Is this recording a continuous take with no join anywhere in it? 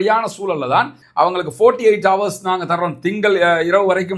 no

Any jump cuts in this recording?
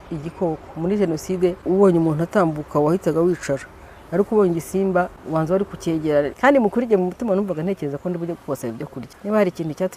yes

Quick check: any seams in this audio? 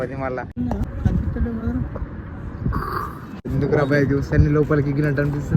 yes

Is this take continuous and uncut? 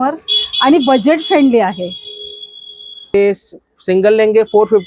no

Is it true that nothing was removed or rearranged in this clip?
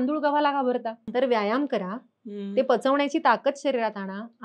no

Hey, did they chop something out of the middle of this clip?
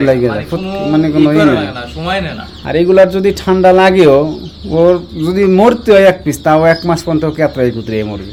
no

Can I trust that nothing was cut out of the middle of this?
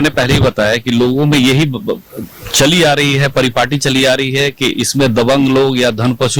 yes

